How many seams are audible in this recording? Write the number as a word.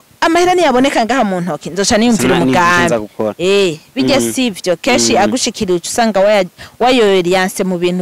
zero